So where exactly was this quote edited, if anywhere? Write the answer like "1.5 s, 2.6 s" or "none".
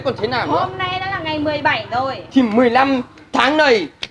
2.2 s